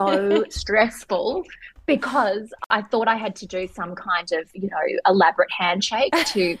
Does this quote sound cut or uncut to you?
cut